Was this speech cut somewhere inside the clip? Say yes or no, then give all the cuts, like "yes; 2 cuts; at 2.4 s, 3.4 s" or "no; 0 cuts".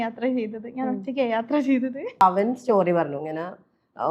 yes; 1 cut; at 2.2 s